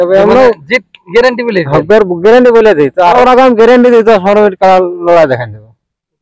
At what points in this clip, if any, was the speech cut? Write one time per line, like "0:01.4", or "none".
0:03.2